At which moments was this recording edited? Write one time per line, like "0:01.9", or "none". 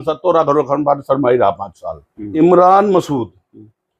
0:02.3

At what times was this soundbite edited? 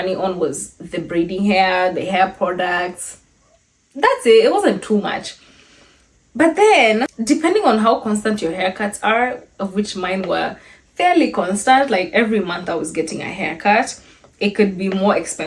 none

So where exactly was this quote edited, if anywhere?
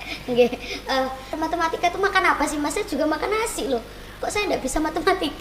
0:01.3

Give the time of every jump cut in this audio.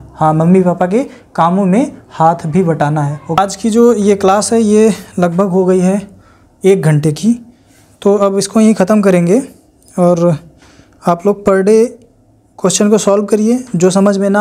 0:03.4

